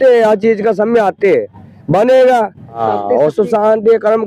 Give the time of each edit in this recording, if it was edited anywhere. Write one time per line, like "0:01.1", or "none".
0:02.8